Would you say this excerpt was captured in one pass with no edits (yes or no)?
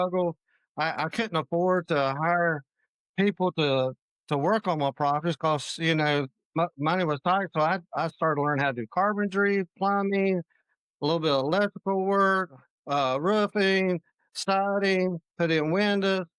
yes